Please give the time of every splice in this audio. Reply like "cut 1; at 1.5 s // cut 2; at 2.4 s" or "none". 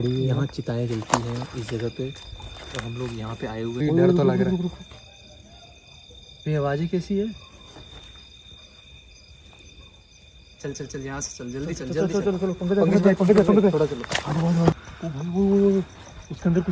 cut 1; at 3.8 s // cut 2; at 14.9 s

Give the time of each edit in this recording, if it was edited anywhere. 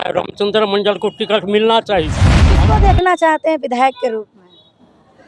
cut 1; at 2.5 s

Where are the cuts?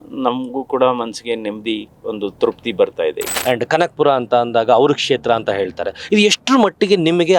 cut 1; at 3.3 s

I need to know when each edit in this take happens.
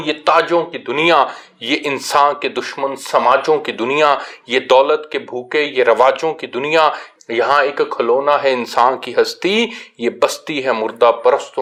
none

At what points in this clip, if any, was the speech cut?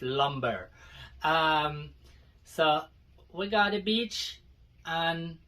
none

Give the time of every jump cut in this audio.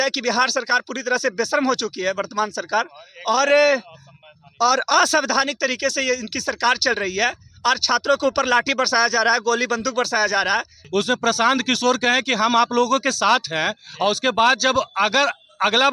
cut 1; at 10.7 s

